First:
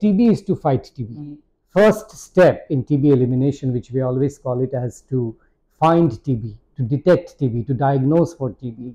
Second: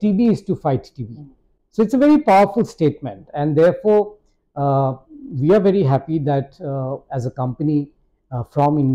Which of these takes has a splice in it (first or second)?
first